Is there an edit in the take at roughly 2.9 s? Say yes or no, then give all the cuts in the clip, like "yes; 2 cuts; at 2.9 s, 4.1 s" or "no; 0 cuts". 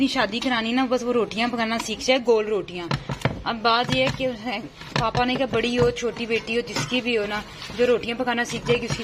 no; 0 cuts